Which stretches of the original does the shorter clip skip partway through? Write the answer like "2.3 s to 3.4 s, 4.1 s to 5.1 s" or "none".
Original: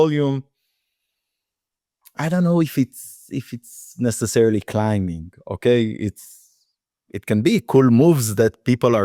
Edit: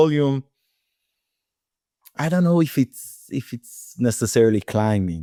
none